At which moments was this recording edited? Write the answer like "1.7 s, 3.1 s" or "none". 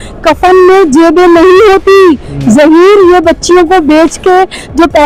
none